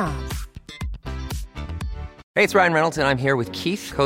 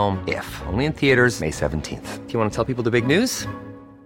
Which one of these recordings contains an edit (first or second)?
first